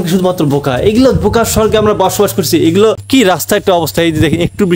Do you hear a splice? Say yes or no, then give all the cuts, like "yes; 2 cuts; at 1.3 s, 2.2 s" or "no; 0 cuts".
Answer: yes; 1 cut; at 3.0 s